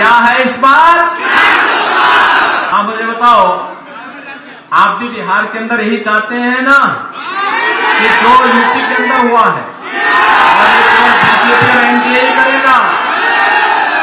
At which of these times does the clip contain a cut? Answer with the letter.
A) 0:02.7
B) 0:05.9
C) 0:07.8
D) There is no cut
A